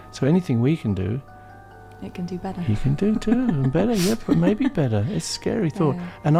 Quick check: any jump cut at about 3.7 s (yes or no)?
no